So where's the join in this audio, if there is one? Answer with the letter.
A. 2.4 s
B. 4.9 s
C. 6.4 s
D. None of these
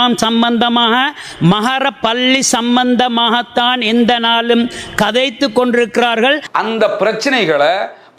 C